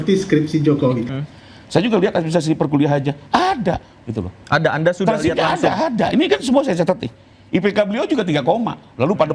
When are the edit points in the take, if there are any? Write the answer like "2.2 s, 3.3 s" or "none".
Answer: 1.1 s